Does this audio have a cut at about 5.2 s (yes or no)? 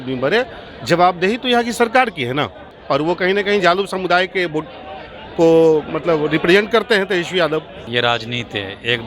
no